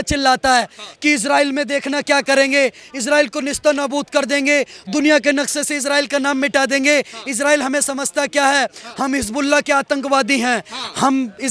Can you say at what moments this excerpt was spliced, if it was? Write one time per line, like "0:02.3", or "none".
none